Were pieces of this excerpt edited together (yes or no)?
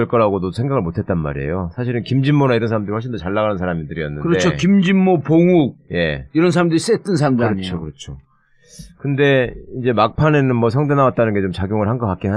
yes